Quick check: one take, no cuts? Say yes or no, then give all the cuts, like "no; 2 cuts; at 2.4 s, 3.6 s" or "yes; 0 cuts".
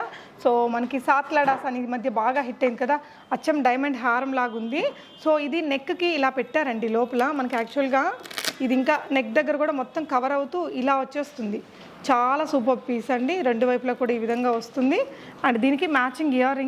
yes; 0 cuts